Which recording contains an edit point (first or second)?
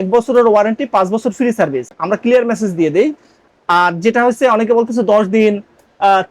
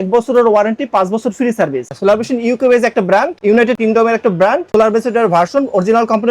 second